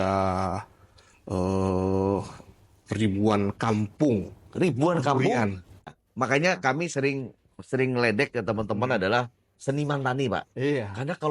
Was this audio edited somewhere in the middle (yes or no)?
yes